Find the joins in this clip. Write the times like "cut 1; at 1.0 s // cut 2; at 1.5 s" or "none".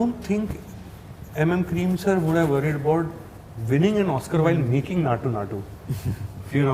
none